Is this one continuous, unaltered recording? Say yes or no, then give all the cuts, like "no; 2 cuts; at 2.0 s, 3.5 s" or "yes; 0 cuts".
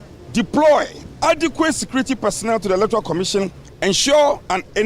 no; 2 cuts; at 1.0 s, 3.6 s